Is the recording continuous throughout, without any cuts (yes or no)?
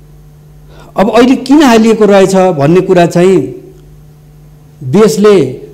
yes